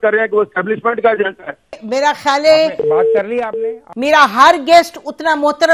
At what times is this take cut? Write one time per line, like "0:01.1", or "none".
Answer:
0:01.8
0:03.9